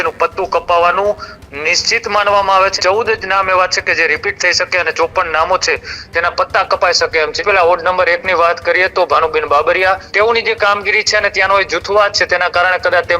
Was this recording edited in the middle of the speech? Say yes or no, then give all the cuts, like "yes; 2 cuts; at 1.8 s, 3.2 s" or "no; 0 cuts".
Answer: yes; 3 cuts; at 2.7 s, 7.4 s, 10.1 s